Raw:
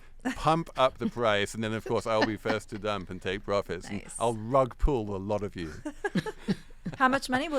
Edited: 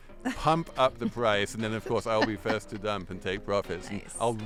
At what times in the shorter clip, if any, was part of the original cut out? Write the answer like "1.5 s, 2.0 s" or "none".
none